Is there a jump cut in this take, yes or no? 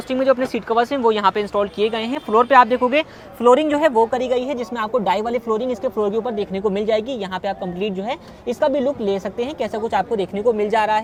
no